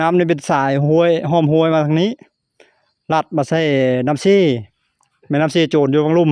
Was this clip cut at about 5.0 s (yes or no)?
no